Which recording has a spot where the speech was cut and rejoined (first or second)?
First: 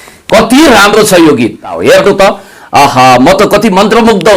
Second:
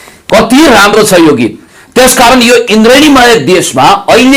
first